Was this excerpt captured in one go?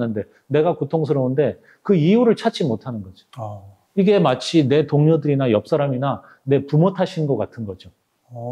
yes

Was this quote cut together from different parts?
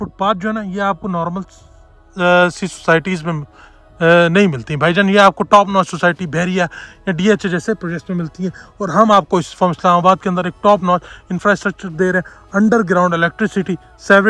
no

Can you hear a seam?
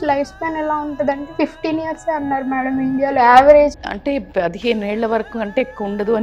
yes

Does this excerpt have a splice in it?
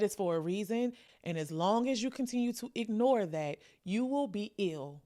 yes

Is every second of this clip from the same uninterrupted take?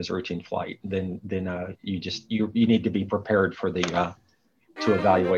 yes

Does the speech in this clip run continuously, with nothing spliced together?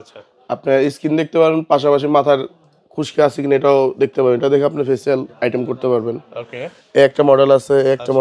yes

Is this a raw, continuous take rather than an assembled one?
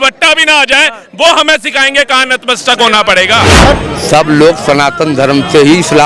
no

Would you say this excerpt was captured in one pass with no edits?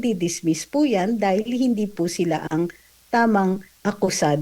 yes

